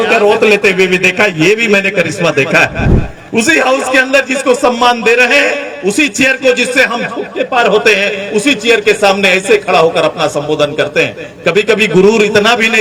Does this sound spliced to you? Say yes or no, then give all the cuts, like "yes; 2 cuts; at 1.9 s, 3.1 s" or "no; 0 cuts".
no; 0 cuts